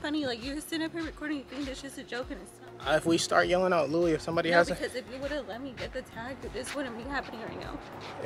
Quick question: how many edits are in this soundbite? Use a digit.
1